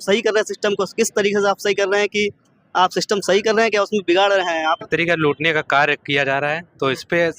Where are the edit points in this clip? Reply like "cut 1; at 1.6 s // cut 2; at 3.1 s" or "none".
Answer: cut 1; at 4.8 s